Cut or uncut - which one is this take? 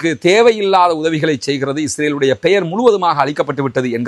uncut